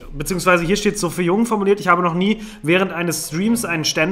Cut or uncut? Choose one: uncut